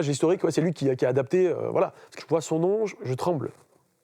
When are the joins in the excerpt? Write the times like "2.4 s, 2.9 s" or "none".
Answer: 2.2 s